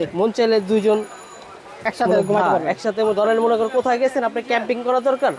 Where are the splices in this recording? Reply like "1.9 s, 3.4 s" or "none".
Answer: none